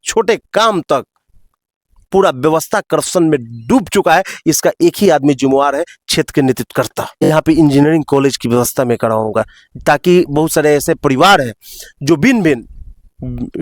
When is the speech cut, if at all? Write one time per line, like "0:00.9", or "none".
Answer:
0:07.3